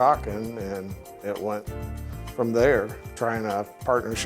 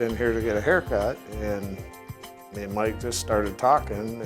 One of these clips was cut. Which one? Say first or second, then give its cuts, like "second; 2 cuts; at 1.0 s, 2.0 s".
first; 1 cut; at 3.0 s